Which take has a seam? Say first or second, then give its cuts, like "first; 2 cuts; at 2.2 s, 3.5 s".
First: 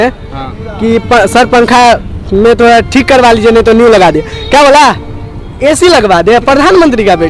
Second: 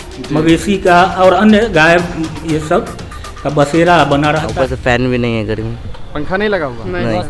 second; 1 cut; at 4.5 s